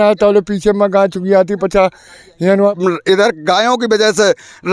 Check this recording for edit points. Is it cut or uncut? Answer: cut